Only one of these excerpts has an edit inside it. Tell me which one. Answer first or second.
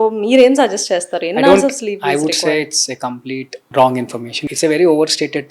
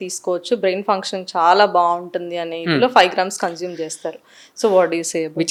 first